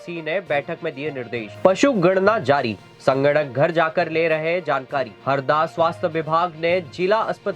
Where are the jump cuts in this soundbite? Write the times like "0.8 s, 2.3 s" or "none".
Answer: 1.5 s, 5.1 s